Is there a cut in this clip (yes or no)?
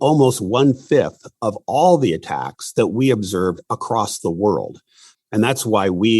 yes